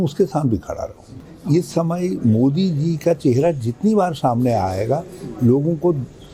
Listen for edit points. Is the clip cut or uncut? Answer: cut